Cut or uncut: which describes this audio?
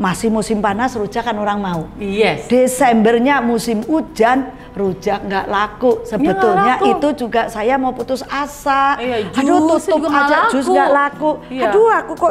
uncut